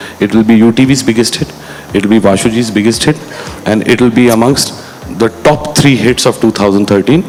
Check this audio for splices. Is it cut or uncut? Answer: uncut